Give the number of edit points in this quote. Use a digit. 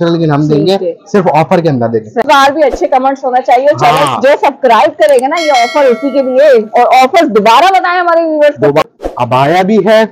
2